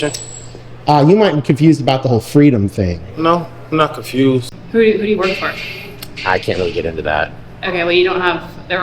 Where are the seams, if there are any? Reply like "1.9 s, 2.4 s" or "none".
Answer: 4.5 s